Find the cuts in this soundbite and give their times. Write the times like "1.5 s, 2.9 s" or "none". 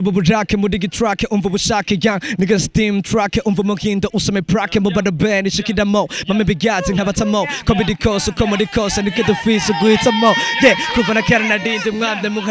none